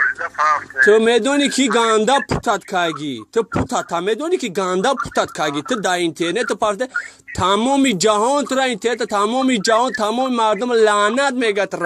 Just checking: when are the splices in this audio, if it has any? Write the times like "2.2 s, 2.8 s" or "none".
1.1 s